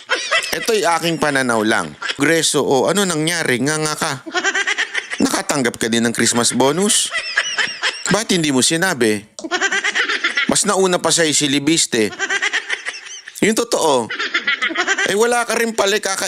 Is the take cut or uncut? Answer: cut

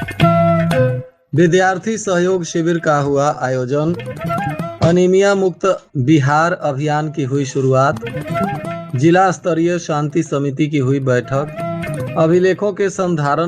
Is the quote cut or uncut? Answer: cut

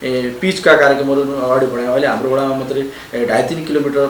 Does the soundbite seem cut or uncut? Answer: uncut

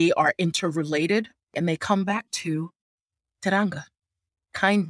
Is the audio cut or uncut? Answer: uncut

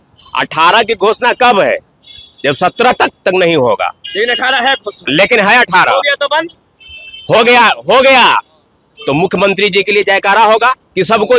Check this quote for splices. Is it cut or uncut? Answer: uncut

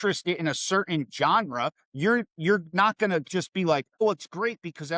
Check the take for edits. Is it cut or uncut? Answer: cut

